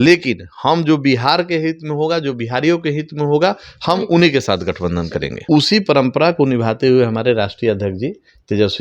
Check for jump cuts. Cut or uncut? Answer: cut